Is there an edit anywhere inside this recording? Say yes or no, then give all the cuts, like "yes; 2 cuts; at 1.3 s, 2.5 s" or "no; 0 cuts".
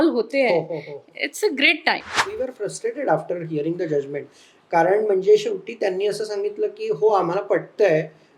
yes; 1 cut; at 2.2 s